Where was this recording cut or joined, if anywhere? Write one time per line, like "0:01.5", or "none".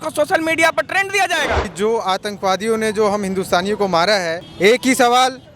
0:01.7
0:04.4

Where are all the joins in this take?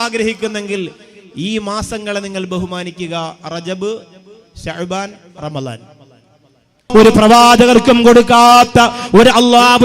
0:06.9

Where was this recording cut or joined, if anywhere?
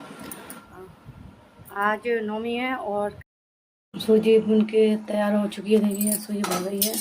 0:03.2

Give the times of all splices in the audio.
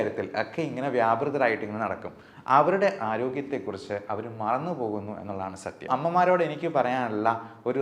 0:05.9

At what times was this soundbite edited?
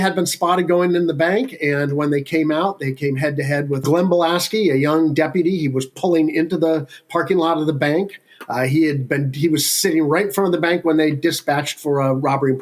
0:03.8

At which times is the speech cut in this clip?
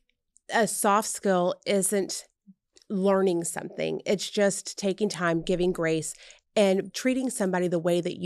0:06.9

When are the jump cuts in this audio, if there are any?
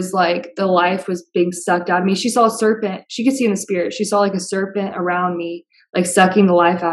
none

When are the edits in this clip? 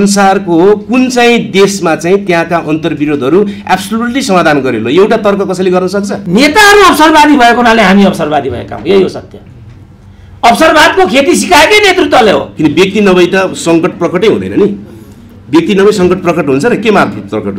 0:06.2
0:12.5

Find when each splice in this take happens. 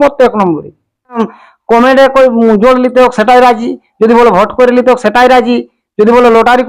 0:01.2

